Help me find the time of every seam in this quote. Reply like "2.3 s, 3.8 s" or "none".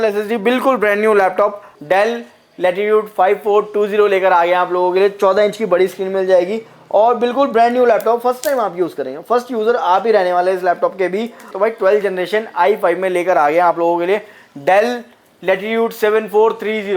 1.7 s, 11.5 s